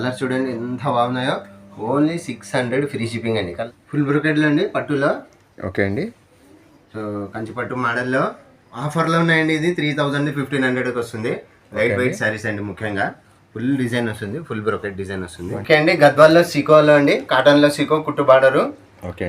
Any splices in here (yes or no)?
yes